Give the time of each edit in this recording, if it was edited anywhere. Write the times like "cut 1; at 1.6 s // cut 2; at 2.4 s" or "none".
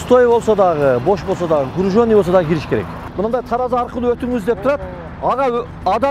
cut 1; at 3.0 s